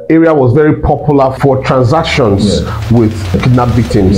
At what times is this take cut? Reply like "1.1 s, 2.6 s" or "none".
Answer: 1.4 s, 3.4 s